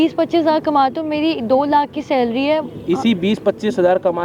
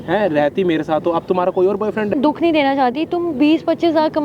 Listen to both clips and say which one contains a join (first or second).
second